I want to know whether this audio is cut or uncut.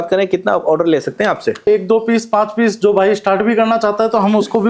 cut